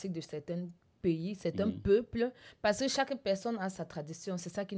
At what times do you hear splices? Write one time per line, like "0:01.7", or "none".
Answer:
none